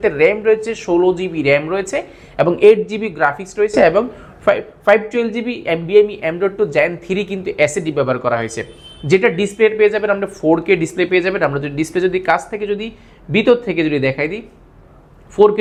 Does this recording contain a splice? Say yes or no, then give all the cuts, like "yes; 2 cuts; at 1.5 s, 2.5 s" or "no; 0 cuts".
no; 0 cuts